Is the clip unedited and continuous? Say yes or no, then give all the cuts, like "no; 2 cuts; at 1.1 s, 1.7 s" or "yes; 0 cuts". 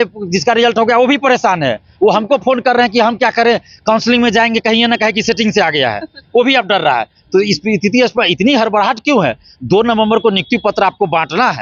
yes; 0 cuts